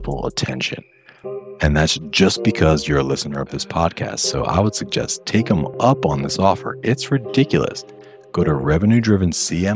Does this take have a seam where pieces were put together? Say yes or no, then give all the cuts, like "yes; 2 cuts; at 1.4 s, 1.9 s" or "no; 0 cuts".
no; 0 cuts